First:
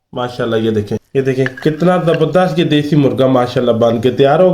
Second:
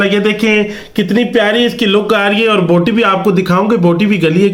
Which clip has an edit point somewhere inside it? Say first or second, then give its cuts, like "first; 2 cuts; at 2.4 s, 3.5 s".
first; 1 cut; at 1.1 s